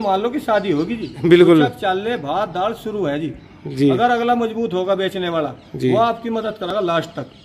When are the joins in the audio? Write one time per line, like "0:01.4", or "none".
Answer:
none